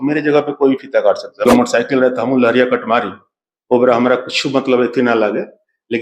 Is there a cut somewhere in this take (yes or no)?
yes